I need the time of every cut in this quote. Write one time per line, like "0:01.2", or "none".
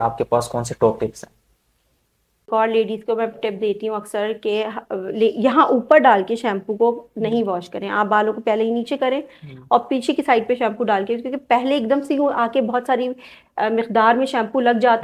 0:02.5